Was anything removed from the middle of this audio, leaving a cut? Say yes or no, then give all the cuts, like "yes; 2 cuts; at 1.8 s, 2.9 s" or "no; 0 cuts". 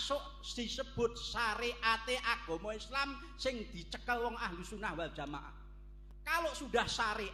no; 0 cuts